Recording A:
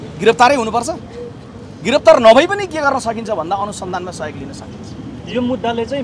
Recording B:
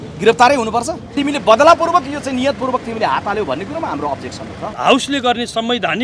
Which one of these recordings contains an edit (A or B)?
B